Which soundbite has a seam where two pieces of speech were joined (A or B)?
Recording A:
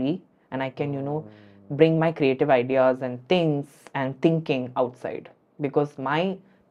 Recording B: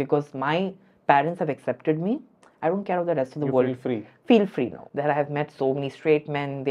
B